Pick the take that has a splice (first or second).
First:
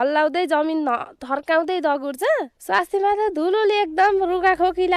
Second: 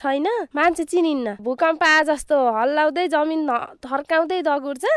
second